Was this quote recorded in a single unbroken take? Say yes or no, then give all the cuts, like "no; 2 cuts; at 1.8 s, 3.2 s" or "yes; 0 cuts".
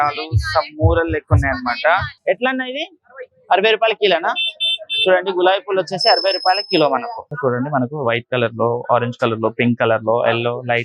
no; 2 cuts; at 2.1 s, 7.3 s